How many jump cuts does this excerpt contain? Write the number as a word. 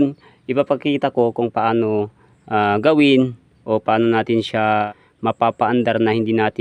one